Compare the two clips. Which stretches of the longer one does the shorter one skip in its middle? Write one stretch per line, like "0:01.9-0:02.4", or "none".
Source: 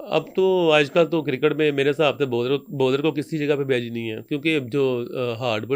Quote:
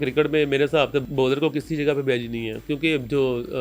0:02.3-0:02.7